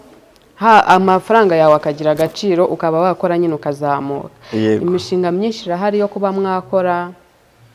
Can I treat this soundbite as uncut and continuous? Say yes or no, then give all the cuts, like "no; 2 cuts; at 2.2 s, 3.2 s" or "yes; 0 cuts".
yes; 0 cuts